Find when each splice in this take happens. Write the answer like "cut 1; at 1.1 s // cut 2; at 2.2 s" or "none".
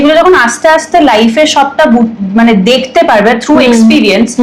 none